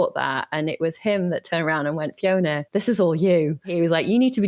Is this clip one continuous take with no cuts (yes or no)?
no